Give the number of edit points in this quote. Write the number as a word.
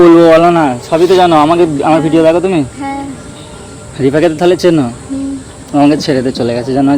zero